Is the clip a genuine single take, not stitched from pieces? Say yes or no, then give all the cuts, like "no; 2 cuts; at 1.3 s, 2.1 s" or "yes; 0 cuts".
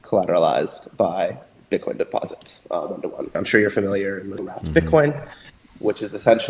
no; 2 cuts; at 3.3 s, 4.5 s